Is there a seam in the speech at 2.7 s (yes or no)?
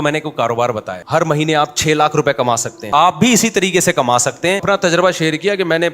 yes